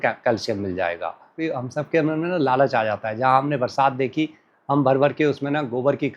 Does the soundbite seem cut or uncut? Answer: cut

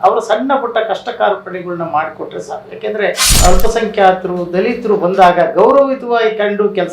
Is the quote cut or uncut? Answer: cut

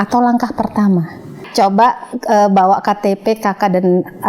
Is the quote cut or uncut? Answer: cut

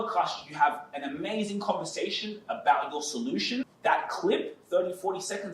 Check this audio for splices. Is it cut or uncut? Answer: cut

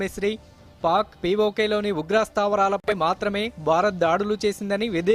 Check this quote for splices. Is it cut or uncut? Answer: uncut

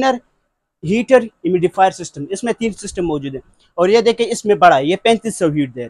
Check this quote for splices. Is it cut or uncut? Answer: uncut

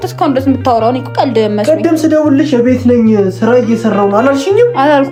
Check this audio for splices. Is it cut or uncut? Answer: uncut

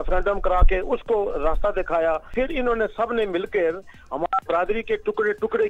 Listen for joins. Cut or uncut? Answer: cut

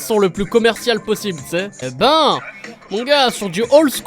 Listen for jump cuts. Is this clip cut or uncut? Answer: cut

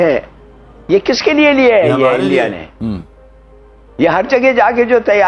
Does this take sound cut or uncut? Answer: uncut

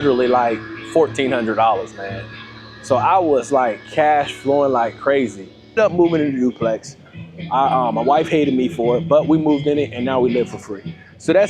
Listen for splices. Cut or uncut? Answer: cut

